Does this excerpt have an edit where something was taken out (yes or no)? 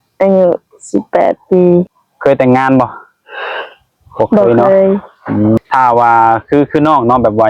yes